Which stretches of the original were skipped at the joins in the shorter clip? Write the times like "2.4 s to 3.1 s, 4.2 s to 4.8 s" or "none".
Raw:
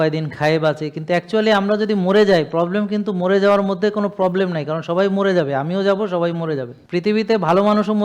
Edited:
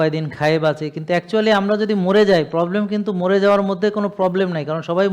none

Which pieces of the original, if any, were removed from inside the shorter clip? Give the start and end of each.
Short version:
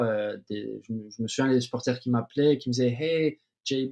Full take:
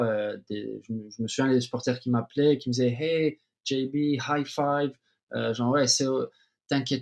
none

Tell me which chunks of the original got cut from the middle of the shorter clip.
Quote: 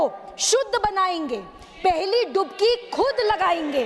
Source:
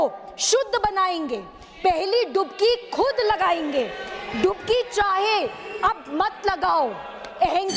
none

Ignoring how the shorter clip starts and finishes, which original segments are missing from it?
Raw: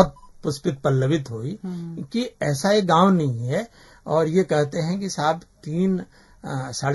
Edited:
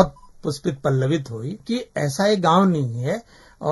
1.5 s to 2.0 s

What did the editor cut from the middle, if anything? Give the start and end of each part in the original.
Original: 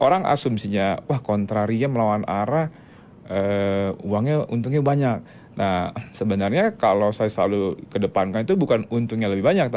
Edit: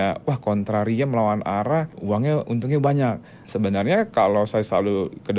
2.8 s to 4.0 s, 5.4 s to 6.0 s

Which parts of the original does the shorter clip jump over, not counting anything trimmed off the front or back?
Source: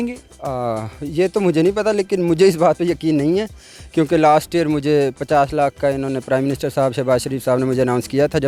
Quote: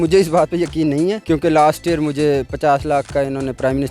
3.5 s to 3.9 s

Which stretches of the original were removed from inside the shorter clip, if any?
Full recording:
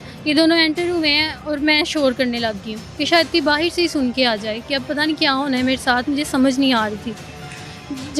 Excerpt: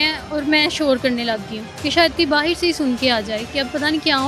none

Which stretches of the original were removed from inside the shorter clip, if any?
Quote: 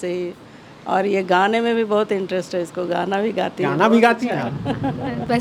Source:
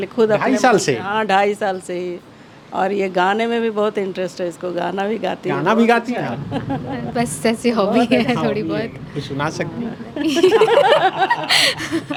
none

